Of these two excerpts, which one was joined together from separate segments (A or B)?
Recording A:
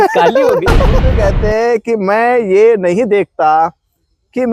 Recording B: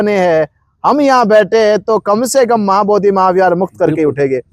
A